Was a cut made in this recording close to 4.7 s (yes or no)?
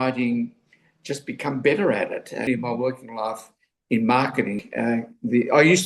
yes